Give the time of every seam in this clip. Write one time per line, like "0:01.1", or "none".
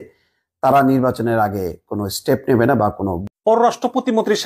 0:03.2